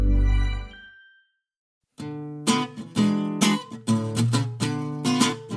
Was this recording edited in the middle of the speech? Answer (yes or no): yes